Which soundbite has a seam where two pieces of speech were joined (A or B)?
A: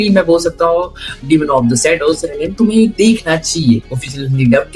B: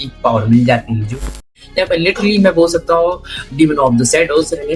B